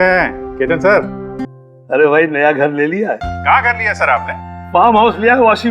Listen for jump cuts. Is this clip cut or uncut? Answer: cut